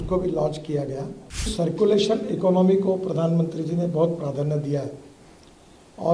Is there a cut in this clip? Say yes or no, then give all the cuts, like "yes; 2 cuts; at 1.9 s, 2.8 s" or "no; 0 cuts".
yes; 1 cut; at 1.5 s